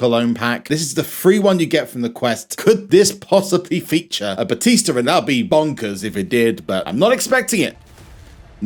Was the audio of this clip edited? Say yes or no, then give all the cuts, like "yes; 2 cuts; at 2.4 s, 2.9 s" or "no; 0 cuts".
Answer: no; 0 cuts